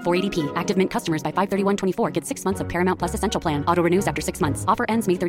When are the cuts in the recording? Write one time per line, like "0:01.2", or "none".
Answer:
none